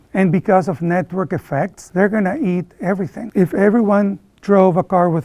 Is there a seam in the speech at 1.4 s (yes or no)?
no